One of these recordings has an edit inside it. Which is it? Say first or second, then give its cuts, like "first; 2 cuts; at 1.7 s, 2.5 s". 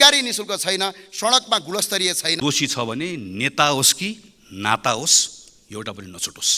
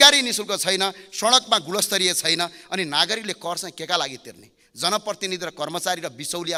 first; 1 cut; at 2.4 s